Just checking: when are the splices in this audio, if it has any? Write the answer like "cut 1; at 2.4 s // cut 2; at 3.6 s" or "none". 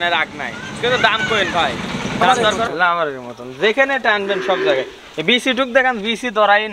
cut 1; at 2.3 s